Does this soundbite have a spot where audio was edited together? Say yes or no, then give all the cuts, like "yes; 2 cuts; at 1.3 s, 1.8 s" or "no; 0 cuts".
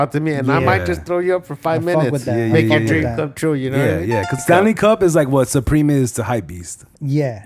yes; 1 cut; at 4.4 s